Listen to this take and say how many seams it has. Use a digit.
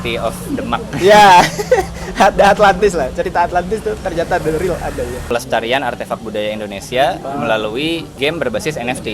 2